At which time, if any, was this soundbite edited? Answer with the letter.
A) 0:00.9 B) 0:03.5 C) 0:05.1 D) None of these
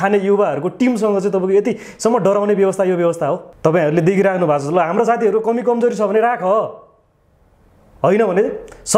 B